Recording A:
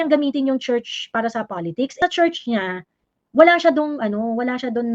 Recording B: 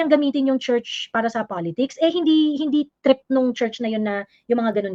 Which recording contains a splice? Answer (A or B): A